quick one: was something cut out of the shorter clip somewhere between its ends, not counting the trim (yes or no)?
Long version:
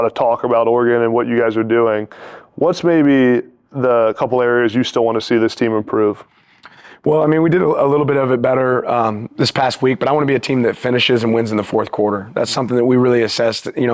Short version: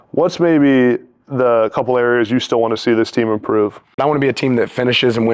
yes